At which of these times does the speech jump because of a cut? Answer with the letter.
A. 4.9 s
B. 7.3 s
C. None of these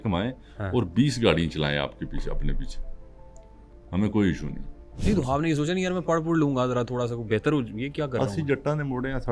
A